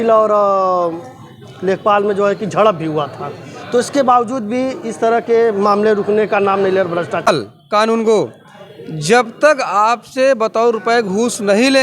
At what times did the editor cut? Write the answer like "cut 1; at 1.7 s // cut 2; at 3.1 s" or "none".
cut 1; at 7.3 s